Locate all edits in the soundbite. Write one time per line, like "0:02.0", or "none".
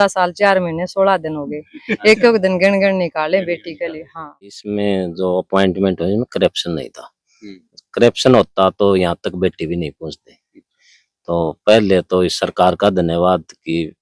0:04.6